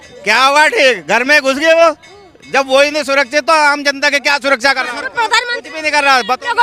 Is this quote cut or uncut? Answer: uncut